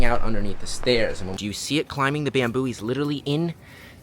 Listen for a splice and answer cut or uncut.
cut